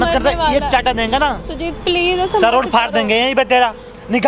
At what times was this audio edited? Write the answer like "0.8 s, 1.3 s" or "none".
none